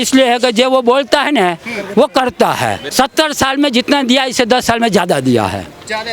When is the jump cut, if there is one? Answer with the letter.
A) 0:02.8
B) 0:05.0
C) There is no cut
A